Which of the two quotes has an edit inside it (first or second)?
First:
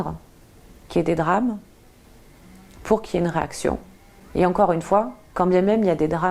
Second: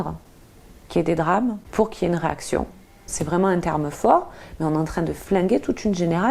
second